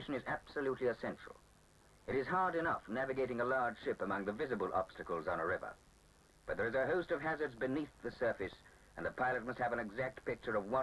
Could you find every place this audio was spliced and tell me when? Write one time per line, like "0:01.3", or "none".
0:03.3